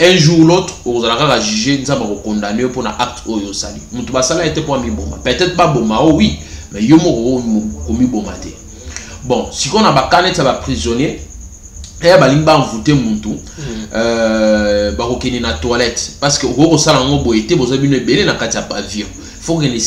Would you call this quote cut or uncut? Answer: uncut